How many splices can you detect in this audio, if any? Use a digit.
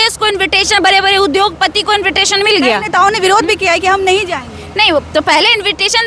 0